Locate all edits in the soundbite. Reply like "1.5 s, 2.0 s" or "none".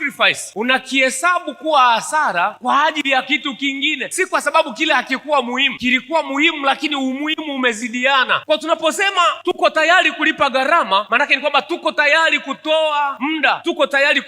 4.0 s